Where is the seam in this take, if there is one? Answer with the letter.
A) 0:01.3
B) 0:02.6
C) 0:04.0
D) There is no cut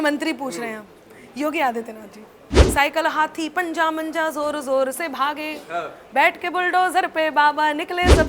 B